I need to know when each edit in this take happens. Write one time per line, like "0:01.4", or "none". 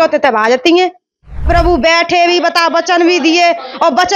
0:01.5